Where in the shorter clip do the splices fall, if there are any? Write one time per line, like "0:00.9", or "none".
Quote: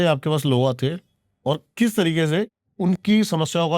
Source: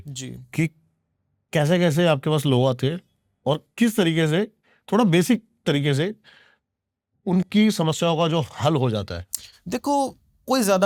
0:02.6

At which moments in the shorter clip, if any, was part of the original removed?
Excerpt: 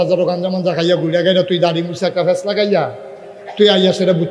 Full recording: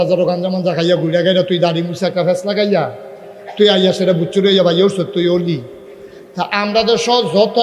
none

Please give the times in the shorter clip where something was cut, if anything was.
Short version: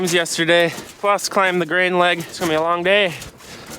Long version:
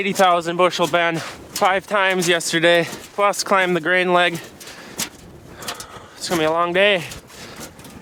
0:02.3

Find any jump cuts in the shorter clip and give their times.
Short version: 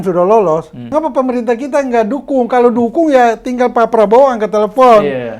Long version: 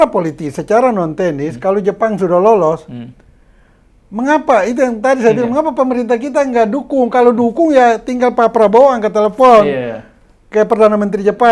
0:00.9

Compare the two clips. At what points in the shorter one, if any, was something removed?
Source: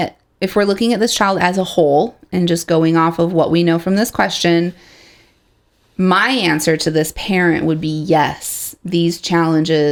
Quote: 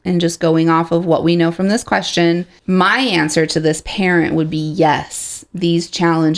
0:02.5

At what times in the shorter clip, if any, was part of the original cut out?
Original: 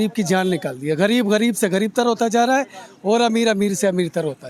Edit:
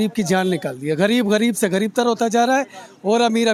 none

